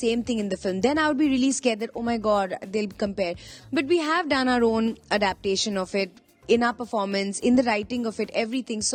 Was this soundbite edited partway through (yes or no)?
no